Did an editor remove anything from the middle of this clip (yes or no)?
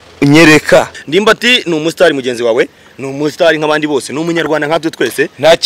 yes